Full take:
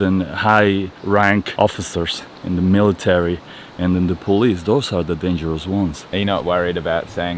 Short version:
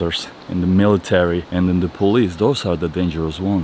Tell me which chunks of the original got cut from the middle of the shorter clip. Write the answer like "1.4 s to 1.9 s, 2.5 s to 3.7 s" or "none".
3.4 s to 3.7 s